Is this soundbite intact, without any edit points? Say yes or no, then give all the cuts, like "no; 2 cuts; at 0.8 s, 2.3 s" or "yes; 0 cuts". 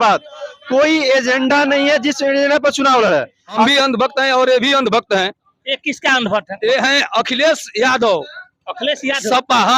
no; 1 cut; at 3.7 s